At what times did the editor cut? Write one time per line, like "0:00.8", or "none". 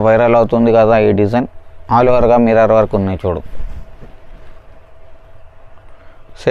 none